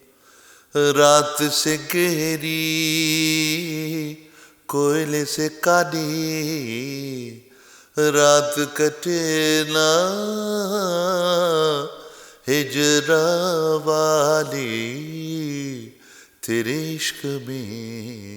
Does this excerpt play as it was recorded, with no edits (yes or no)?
yes